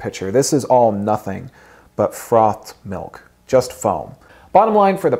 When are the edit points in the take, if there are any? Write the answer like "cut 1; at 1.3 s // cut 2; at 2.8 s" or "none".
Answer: cut 1; at 4.3 s